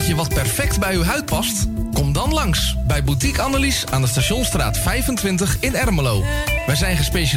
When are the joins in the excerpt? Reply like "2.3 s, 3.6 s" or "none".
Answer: none

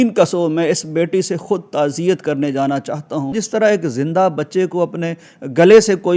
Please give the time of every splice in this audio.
3.3 s

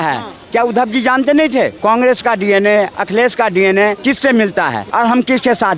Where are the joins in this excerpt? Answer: 1.7 s, 3.0 s, 4.0 s, 4.8 s

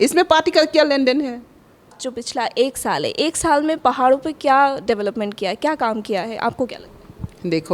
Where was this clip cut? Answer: 2.0 s

